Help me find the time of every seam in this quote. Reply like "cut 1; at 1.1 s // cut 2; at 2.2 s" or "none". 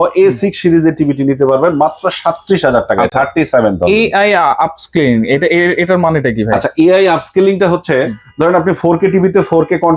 none